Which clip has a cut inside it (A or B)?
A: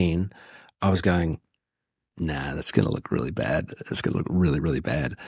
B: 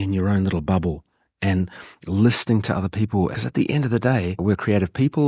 B